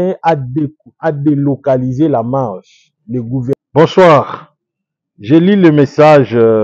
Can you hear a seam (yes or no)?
yes